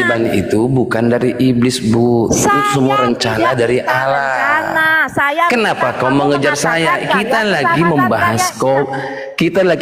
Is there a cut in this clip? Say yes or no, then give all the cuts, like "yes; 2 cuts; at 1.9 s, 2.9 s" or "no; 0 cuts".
yes; 1 cut; at 4.8 s